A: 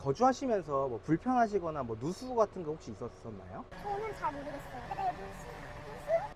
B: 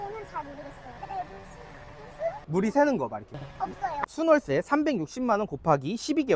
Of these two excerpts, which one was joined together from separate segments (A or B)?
B